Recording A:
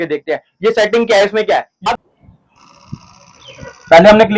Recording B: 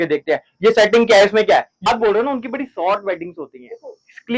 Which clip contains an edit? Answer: A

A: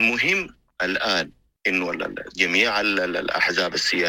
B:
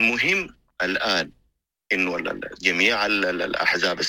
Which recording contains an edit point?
A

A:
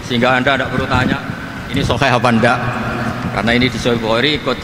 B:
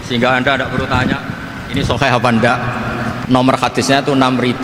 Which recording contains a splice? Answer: B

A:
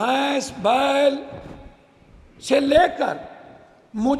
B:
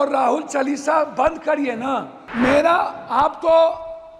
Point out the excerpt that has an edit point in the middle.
B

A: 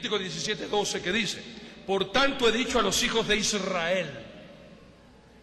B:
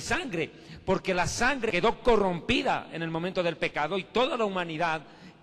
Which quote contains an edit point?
B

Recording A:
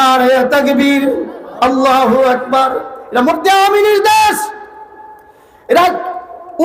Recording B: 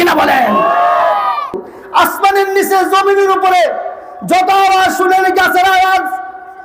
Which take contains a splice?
B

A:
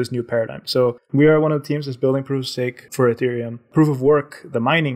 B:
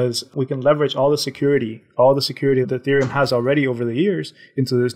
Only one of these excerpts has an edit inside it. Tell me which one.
A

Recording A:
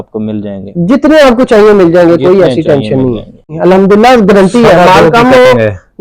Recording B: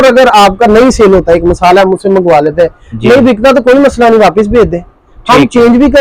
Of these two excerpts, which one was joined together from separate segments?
A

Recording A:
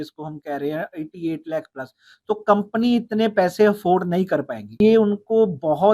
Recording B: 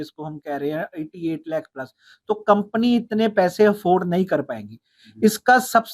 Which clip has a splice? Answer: A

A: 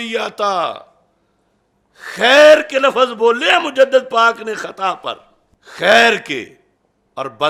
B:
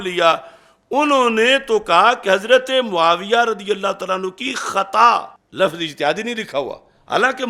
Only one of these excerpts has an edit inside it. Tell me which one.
B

